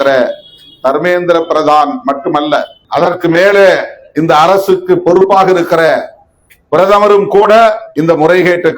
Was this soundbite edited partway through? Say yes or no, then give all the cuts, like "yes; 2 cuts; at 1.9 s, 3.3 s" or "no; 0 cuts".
yes; 2 cuts; at 2.8 s, 7.9 s